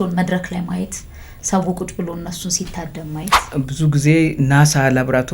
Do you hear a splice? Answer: yes; 1 cut; at 3.5 s

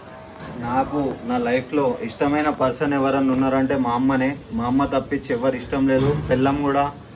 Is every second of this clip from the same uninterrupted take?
yes; 0 cuts

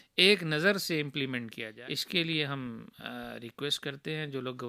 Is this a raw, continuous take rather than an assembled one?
no; 1 cut; at 1.7 s

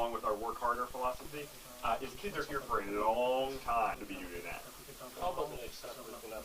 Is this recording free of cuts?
no; 1 cut; at 4.1 s

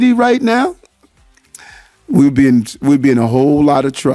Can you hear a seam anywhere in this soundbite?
no; 0 cuts

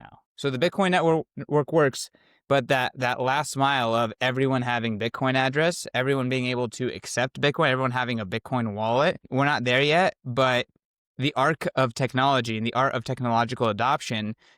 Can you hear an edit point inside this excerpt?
yes; 1 cut; at 9.2 s

